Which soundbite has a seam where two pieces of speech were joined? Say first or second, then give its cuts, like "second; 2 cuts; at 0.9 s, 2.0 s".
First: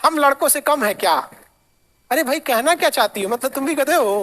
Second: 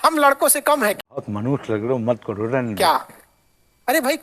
first; 1 cut; at 1.0 s